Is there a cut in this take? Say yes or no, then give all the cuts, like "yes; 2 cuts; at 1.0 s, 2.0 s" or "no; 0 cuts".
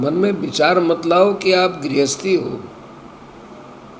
no; 0 cuts